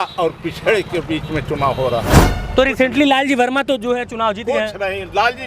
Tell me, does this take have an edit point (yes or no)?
yes